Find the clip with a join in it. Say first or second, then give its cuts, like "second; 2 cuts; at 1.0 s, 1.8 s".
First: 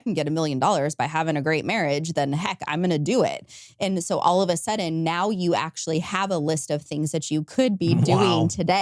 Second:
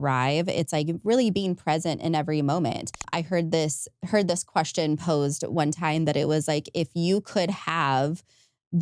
second; 1 cut; at 3.0 s